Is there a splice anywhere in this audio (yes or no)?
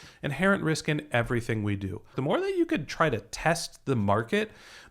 yes